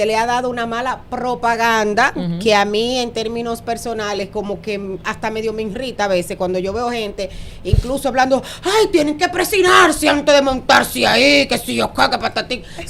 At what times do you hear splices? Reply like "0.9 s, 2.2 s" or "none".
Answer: none